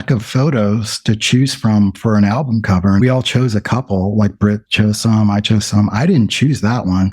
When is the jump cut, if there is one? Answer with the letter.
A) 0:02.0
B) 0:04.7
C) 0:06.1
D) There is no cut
B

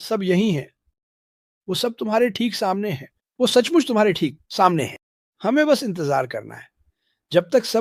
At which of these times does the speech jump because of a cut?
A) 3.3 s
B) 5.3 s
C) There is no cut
C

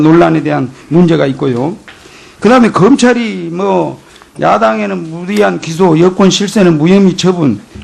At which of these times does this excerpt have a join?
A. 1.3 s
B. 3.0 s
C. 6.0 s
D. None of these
B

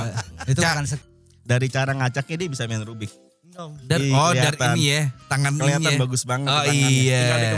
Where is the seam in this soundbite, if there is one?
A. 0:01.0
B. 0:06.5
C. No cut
A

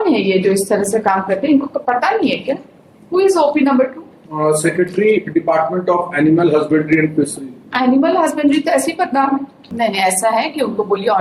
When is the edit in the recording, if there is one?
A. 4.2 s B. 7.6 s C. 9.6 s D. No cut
C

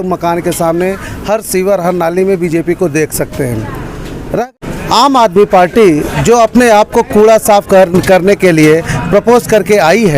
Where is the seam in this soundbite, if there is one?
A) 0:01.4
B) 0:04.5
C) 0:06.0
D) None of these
B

